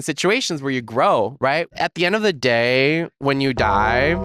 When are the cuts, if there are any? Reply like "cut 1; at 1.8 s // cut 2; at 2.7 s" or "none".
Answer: cut 1; at 1.7 s

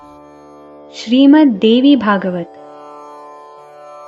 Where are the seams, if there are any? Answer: cut 1; at 1.1 s

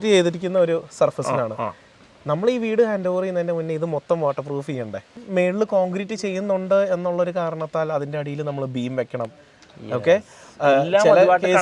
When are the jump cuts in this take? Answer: cut 1; at 5.2 s

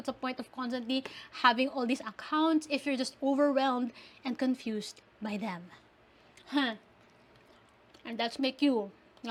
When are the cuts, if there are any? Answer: none

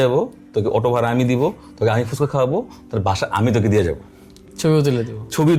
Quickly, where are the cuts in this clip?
none

